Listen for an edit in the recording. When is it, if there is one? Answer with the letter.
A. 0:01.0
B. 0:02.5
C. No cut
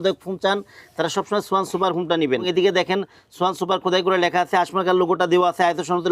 B